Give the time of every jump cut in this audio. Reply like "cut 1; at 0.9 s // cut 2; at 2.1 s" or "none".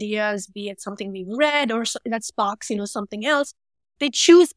cut 1; at 3.7 s